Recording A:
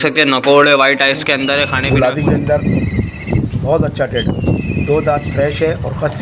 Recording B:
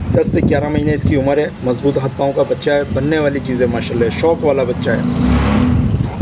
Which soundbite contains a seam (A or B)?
A